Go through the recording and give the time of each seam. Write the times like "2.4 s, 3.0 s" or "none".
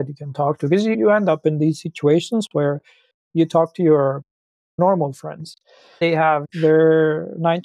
4.8 s, 6.0 s